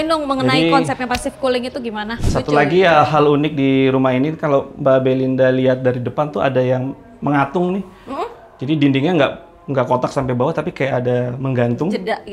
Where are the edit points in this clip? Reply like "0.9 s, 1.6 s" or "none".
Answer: 2.2 s